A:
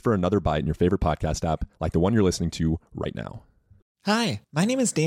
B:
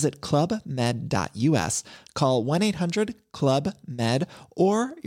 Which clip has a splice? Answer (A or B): A